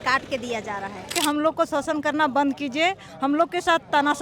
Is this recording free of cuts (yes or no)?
no